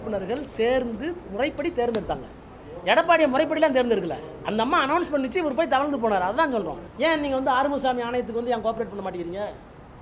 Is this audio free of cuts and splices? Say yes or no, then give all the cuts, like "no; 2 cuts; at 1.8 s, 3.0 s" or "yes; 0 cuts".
no; 1 cut; at 6.8 s